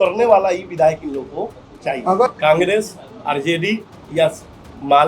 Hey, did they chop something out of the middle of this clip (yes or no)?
yes